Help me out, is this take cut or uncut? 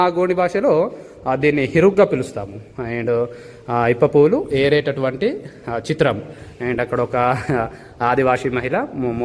uncut